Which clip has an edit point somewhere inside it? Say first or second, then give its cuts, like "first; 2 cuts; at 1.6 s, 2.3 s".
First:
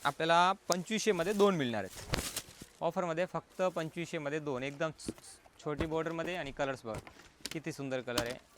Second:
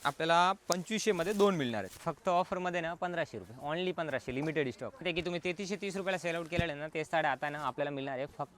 second; 2 cuts; at 1.9 s, 5.0 s